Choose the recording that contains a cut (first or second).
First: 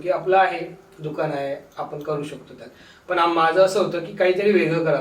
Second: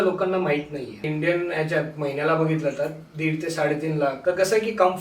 second